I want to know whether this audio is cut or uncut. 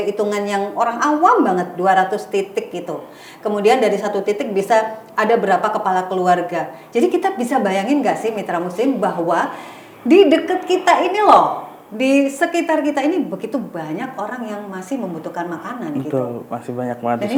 uncut